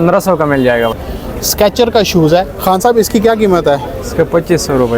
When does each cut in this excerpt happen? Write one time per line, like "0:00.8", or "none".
0:01.0